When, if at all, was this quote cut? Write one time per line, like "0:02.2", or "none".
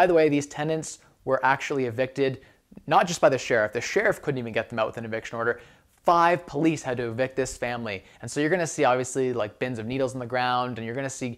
none